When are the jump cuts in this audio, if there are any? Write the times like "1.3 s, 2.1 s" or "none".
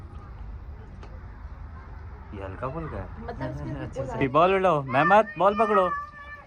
4.2 s